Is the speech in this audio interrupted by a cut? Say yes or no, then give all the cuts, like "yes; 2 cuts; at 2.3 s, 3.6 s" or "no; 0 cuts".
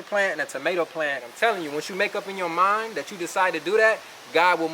yes; 1 cut; at 1.2 s